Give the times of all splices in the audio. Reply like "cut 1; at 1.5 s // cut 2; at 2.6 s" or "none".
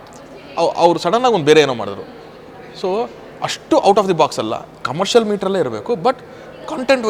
none